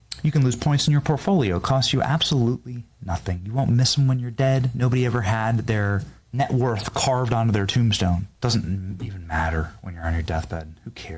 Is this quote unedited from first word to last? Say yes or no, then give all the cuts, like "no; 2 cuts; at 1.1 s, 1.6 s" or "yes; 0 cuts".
no; 2 cuts; at 6.2 s, 8.3 s